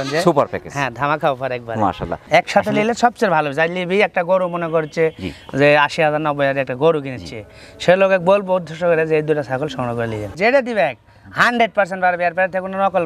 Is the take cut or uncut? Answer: cut